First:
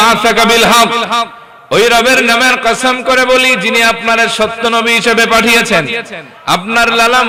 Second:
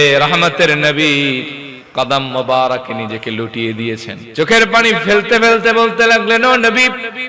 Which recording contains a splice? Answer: second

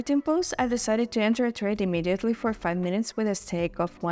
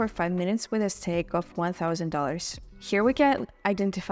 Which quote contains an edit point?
second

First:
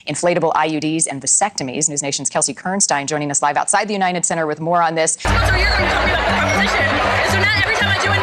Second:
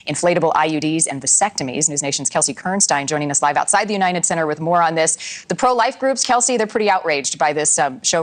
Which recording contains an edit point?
first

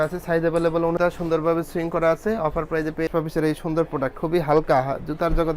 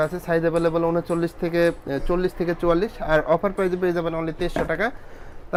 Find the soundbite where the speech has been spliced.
first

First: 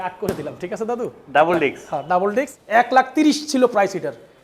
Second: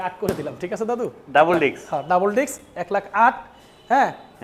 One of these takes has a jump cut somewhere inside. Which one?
first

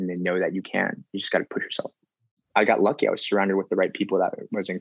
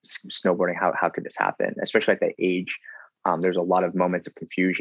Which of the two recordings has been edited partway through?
first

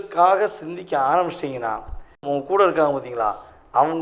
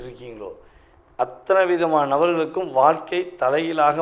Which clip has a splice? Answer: first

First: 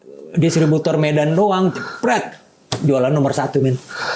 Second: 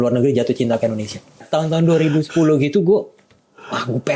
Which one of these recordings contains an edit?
second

